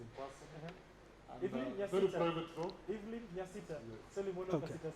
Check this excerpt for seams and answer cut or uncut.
uncut